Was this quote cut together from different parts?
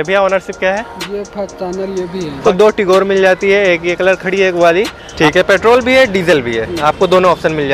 yes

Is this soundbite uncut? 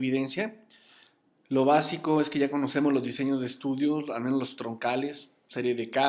no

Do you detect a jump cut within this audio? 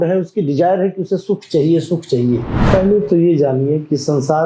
yes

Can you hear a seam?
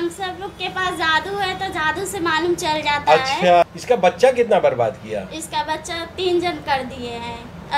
yes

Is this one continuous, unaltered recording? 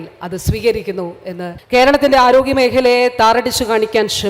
no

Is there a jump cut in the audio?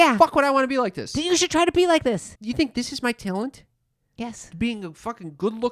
yes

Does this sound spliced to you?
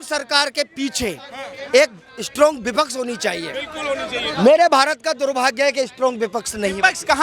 no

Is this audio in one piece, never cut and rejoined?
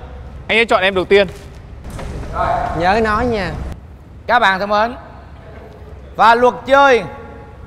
yes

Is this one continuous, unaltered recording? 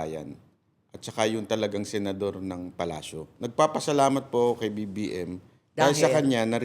no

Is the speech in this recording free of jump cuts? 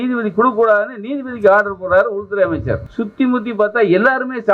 no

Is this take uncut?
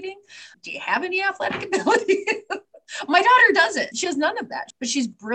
no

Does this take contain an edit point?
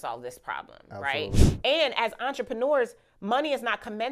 yes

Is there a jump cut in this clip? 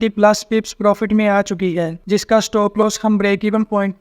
yes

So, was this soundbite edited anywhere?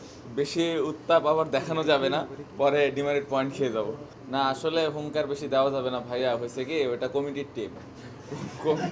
yes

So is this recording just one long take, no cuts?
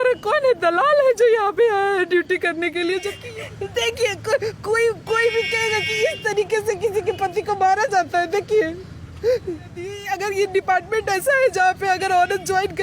no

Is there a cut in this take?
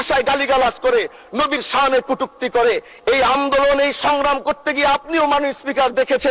no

